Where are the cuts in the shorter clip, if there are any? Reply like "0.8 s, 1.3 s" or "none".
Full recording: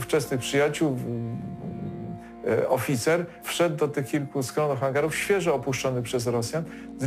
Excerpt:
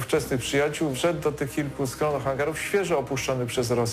1.0 s